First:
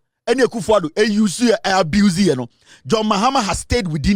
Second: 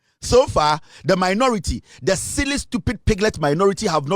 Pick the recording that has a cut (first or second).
second